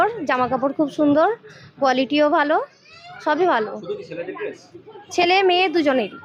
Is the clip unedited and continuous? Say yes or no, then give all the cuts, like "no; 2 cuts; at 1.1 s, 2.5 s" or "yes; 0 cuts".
yes; 0 cuts